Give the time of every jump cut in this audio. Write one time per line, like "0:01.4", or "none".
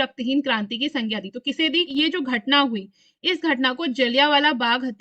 0:01.9